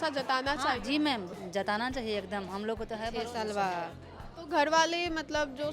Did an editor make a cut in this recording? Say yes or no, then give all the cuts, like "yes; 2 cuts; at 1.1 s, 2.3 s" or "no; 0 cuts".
yes; 1 cut; at 3.1 s